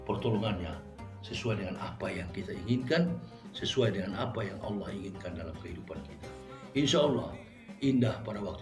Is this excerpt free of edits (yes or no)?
yes